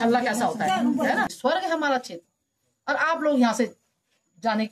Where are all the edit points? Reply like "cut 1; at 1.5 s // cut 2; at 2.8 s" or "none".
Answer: cut 1; at 1.3 s